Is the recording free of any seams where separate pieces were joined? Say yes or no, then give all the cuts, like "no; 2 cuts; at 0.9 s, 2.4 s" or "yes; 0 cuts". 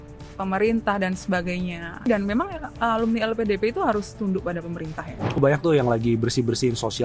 no; 2 cuts; at 2.0 s, 5.4 s